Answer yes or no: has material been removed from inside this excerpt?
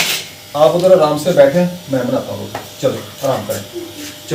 no